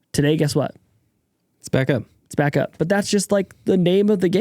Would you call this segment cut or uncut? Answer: cut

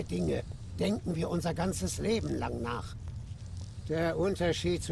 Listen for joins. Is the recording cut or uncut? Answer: uncut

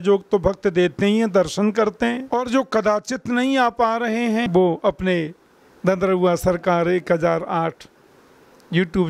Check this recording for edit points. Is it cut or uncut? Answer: cut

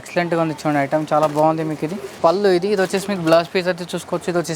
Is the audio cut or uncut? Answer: cut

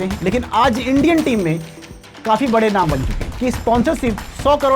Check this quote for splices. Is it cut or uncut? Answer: cut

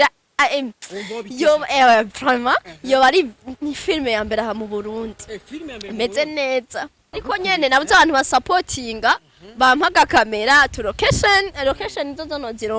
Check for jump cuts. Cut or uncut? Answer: cut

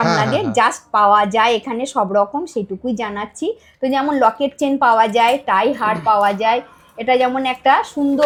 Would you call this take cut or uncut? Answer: uncut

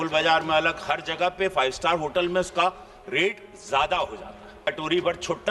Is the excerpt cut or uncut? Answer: cut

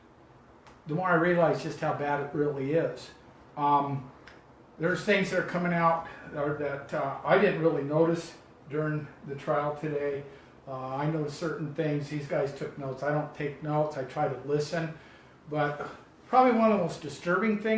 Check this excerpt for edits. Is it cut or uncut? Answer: cut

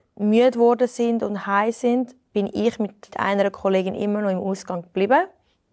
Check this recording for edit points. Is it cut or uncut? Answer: cut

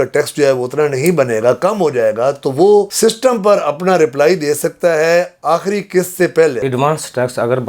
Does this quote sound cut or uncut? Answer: cut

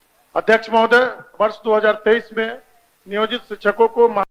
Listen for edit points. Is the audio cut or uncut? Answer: uncut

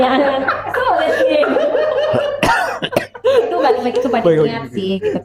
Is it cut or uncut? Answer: uncut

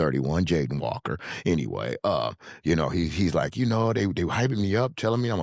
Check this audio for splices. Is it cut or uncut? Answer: uncut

